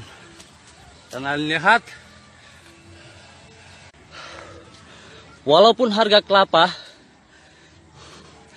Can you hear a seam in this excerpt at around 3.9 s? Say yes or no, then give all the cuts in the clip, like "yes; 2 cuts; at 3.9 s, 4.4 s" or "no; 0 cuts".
yes; 1 cut; at 3.9 s